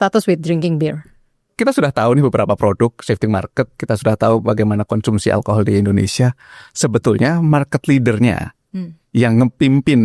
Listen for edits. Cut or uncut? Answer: cut